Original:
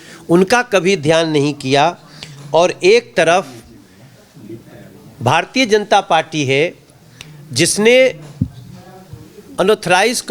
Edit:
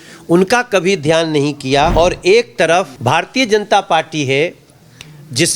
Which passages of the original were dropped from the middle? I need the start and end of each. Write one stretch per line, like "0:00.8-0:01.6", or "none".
0:01.9-0:02.5
0:03.5-0:05.1